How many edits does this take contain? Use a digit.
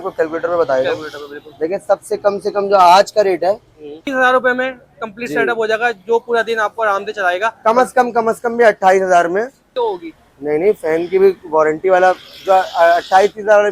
2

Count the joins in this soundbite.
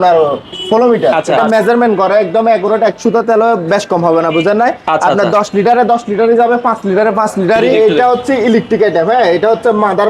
2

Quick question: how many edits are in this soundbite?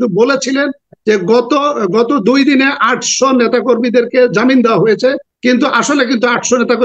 1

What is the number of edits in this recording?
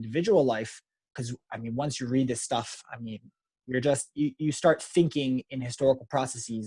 1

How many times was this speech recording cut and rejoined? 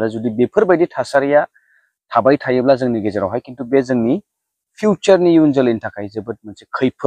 0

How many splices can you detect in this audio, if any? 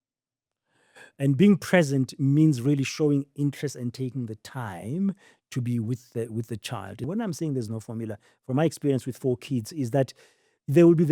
1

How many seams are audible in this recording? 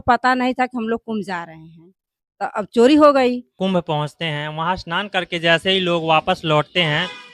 1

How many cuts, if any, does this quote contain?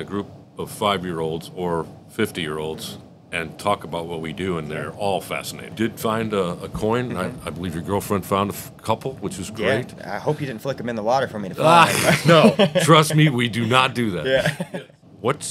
2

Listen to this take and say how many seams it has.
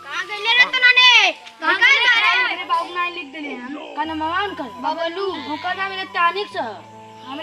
1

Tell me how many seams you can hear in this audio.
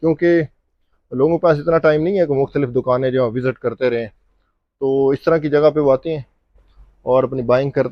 0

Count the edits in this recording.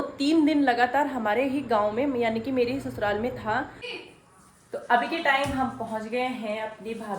1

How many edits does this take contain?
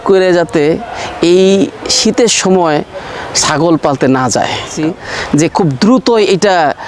1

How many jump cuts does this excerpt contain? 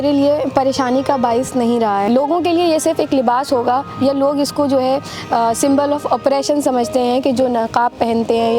1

